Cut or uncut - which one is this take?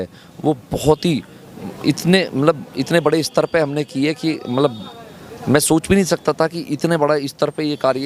uncut